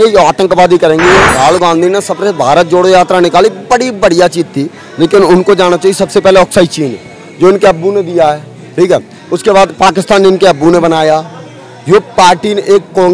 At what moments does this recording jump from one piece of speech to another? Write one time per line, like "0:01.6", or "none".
0:01.3